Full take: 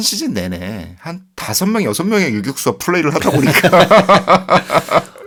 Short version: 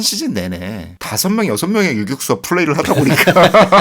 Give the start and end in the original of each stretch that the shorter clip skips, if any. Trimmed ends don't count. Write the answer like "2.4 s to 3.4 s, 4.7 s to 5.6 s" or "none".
0.9 s to 1.3 s